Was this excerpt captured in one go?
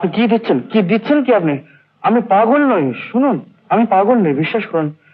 yes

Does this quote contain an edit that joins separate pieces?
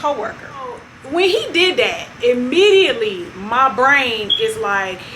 yes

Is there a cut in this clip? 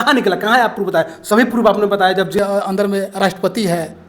yes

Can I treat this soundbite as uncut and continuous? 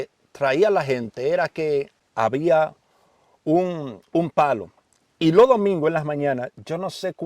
no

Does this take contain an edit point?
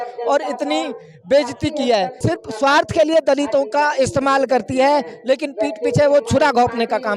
yes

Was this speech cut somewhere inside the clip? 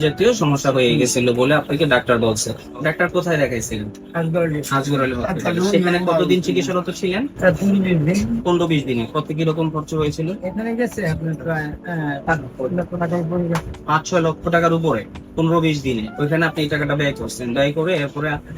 no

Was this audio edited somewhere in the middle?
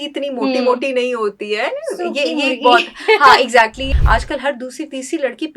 yes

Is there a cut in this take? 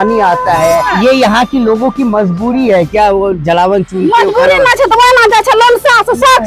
yes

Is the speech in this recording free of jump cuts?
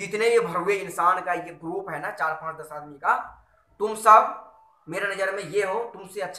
yes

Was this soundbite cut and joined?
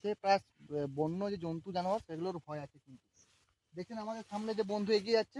no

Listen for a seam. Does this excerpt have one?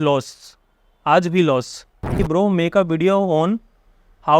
yes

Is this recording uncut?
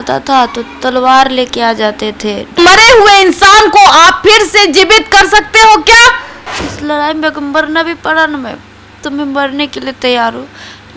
no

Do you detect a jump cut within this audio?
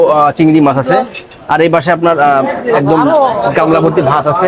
no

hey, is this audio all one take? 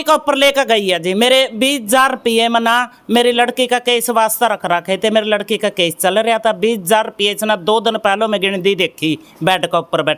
yes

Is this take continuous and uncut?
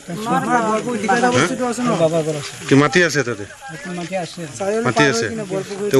yes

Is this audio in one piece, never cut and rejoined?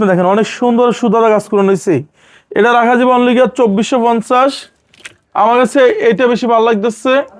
yes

